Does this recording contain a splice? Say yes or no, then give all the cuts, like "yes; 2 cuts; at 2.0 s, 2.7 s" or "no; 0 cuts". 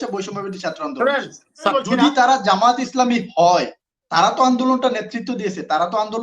yes; 1 cut; at 1.7 s